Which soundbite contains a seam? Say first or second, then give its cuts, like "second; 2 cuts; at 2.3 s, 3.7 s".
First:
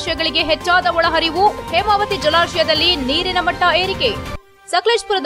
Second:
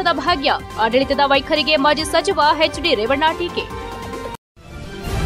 second; 1 cut; at 4.4 s